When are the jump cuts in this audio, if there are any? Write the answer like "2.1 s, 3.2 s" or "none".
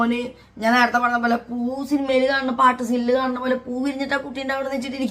none